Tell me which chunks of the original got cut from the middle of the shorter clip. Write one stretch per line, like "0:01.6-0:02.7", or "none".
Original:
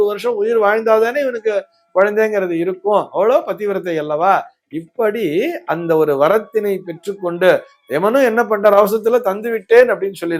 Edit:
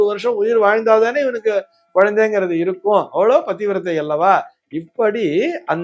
none